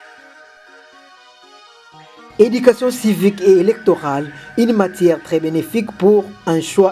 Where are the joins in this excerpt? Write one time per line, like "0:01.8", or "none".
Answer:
0:00.9
0:02.4